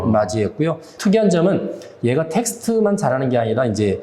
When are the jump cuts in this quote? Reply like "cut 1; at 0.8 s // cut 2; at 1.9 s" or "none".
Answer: cut 1; at 0.9 s